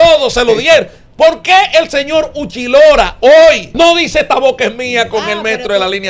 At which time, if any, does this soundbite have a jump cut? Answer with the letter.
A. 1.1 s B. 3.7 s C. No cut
B